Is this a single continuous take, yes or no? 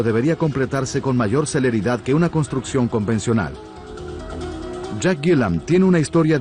no